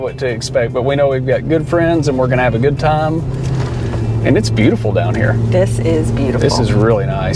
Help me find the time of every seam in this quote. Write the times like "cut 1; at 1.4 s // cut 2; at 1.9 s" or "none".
none